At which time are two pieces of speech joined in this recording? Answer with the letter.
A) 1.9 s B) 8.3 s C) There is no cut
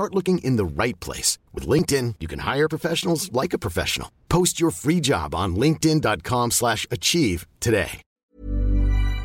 B